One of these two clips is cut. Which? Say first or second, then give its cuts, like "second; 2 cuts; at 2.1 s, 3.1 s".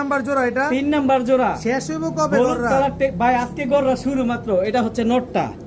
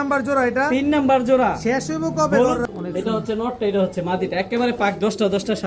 second; 1 cut; at 2.6 s